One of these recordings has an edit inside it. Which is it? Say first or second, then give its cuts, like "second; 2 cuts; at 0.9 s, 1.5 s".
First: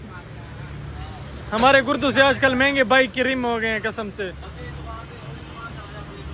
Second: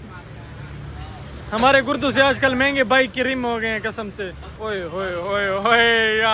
second; 1 cut; at 4.4 s